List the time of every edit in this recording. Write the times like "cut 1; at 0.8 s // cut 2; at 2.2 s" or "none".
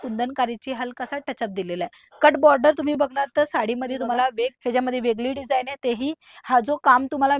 cut 1; at 4.6 s